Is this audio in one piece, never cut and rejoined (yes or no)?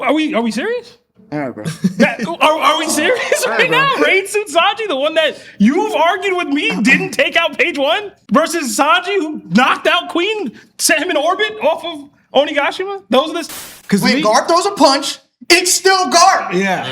no